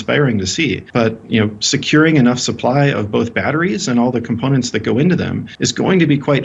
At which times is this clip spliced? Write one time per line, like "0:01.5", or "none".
0:00.8
0:05.5